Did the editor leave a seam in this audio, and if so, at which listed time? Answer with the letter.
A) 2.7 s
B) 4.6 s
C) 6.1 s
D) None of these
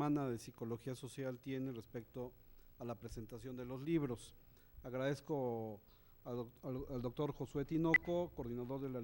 C